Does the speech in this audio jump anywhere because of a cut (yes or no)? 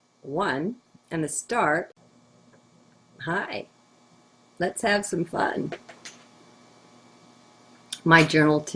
no